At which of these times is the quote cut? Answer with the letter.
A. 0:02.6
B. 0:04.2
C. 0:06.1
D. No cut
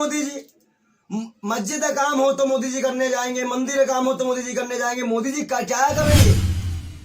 C